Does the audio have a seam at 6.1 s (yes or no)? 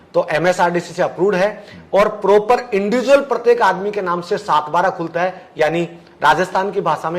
no